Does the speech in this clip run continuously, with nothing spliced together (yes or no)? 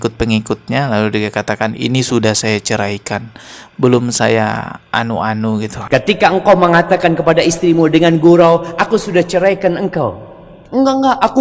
no